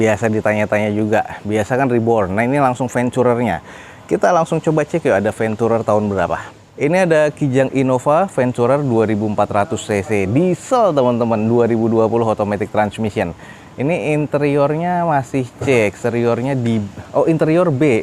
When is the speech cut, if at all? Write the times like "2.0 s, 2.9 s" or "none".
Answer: none